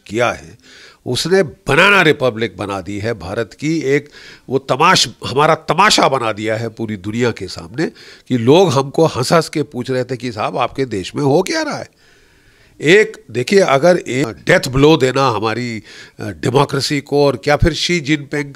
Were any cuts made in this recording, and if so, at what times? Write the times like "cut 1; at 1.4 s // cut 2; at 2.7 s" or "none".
cut 1; at 14.2 s